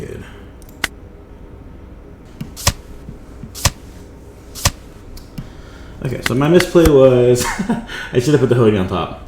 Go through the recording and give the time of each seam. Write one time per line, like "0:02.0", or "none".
0:02.2